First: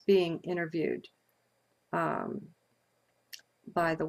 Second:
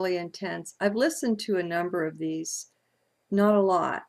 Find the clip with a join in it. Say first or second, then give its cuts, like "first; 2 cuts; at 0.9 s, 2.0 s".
second; 1 cut; at 0.9 s